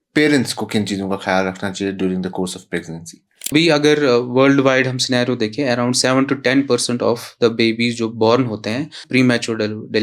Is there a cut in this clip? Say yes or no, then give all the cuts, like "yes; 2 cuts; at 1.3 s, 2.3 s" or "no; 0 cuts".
yes; 2 cuts; at 3.5 s, 9.0 s